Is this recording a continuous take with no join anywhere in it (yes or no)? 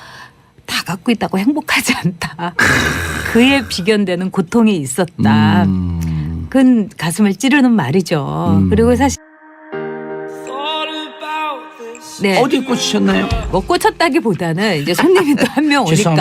no